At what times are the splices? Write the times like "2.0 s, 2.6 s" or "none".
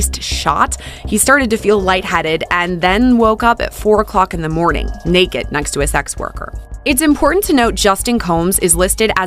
none